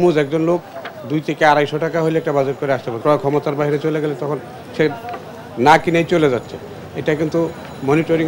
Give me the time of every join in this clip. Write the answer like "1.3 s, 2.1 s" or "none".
2.9 s